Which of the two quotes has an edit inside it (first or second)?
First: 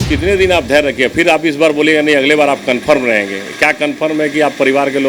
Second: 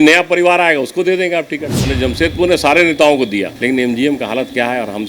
second